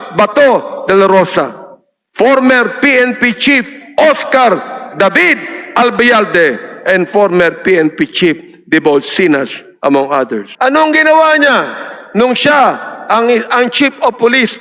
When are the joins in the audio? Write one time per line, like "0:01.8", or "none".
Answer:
0:10.4